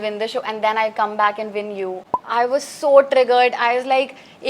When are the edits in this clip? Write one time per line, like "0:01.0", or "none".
0:02.1